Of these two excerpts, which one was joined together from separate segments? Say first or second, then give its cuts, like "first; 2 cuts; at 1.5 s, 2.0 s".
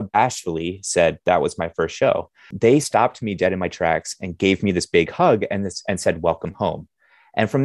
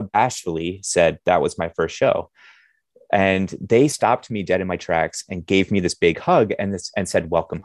first; 1 cut; at 2.5 s